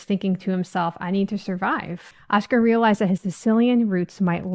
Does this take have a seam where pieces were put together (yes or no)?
yes